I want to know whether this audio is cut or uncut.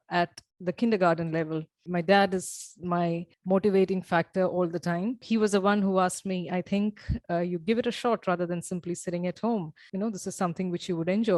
uncut